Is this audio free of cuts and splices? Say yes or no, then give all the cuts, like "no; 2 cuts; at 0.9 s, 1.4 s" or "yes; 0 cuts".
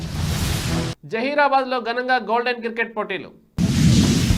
yes; 0 cuts